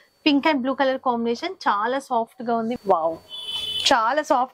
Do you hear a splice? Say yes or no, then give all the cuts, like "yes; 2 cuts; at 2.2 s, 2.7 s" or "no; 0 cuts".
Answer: yes; 1 cut; at 2.8 s